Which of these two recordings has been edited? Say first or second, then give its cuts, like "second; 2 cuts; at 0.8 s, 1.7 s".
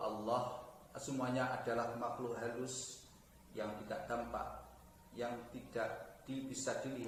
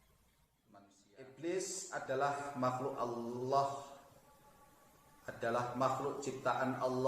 second; 1 cut; at 1.0 s